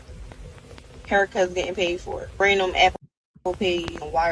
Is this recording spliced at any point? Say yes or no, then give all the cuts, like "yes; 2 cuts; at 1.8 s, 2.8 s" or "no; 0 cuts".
no; 0 cuts